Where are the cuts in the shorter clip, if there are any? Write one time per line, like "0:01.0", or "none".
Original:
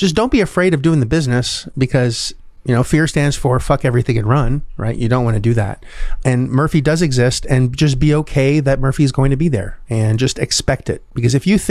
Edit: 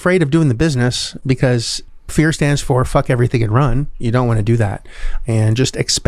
0:02.1
0:03.9
0:05.1